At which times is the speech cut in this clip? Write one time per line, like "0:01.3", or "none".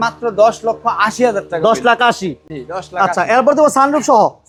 none

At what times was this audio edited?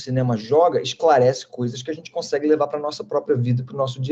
none

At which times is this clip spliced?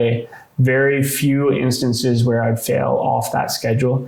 none

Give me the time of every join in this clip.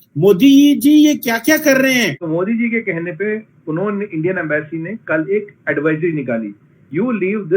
0:02.2

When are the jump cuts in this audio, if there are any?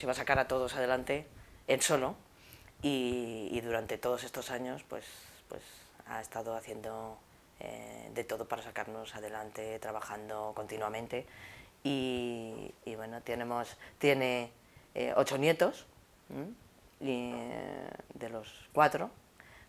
0:15.6

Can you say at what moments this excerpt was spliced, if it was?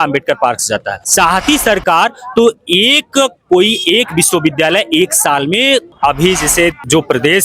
0:01.0
0:05.9

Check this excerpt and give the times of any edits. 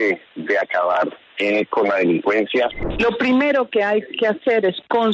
0:02.8

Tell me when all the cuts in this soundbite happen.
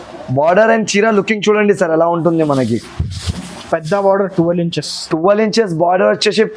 none

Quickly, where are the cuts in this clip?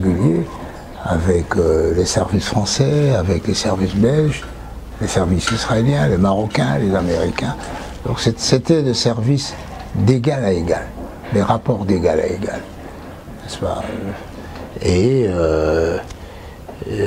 none

